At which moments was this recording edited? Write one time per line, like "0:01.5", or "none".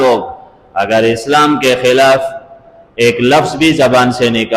none